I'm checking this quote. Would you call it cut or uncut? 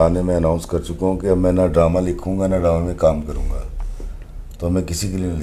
uncut